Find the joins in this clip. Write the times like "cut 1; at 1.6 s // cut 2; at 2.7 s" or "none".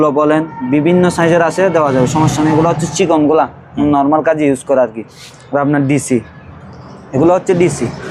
none